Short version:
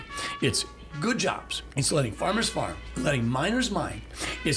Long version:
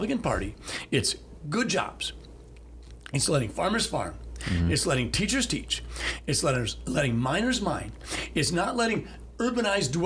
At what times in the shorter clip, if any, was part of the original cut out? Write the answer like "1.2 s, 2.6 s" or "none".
1.5 s, 2.9 s